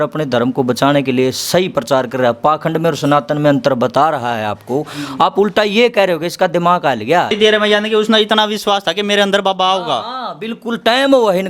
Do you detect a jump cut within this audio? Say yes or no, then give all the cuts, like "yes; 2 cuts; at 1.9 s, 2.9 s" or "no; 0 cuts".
yes; 1 cut; at 7.3 s